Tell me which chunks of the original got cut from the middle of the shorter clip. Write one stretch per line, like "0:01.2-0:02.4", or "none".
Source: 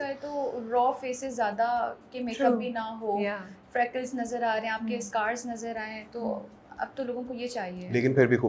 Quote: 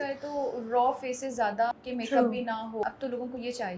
0:01.7-0:02.0
0:03.1-0:06.8